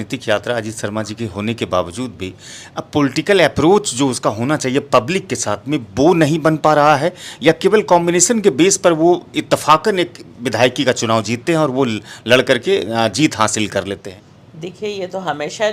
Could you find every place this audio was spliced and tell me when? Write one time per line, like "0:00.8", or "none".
none